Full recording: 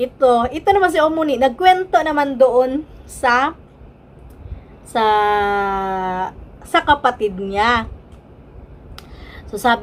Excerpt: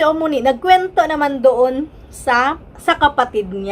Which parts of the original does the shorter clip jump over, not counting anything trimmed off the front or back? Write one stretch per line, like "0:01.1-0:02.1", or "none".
0:03.6-0:06.5